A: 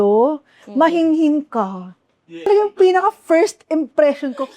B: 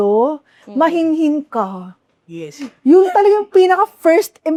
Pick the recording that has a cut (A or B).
A